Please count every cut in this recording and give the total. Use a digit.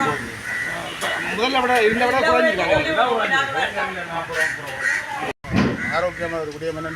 1